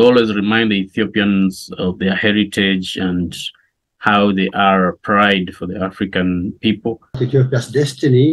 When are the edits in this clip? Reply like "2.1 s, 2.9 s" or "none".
7.2 s